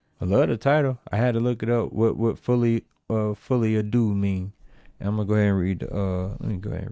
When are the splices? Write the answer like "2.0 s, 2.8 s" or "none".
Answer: none